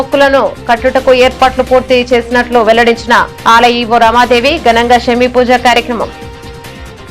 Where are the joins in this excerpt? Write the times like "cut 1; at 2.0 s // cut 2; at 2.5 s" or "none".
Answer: cut 1; at 6.1 s